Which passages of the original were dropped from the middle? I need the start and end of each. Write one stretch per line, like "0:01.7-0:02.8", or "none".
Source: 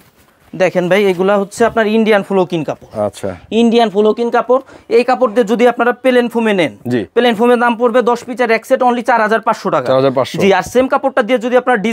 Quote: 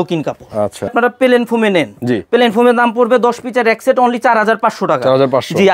0:03.3-0:05.8